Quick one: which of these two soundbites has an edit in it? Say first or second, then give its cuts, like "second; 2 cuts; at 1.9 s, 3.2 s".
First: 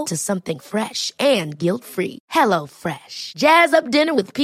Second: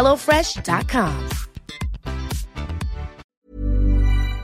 second; 1 cut; at 3.2 s